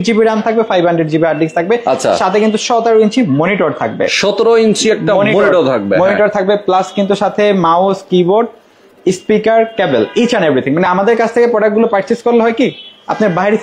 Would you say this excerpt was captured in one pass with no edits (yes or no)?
yes